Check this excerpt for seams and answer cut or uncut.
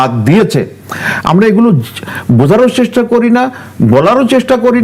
uncut